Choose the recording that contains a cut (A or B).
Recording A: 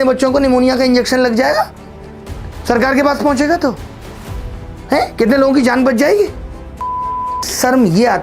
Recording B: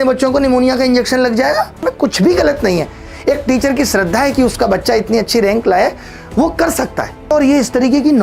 B